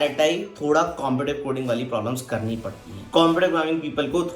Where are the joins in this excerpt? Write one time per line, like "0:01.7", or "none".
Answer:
0:02.9